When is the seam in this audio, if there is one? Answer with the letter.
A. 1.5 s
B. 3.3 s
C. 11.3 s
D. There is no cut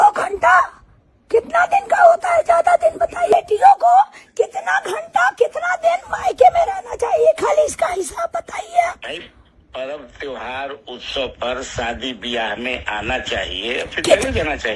B